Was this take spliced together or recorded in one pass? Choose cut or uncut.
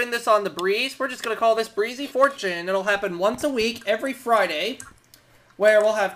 uncut